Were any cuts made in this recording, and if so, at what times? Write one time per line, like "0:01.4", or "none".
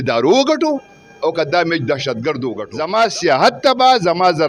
0:02.6